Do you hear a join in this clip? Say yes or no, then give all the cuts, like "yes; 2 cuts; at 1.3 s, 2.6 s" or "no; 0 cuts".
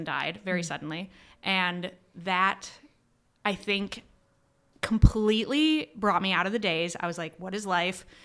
no; 0 cuts